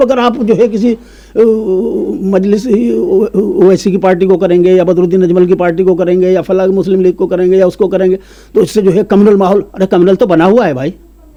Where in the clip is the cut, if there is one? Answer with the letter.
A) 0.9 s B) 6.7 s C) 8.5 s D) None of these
D